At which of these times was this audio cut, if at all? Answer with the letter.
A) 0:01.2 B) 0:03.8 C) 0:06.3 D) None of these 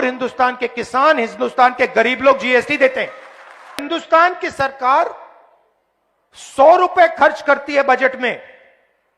B